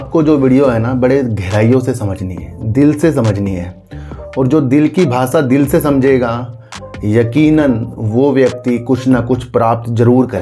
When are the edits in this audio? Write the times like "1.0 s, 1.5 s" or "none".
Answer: none